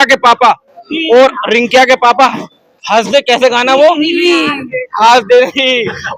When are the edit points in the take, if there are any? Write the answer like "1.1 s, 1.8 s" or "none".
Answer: none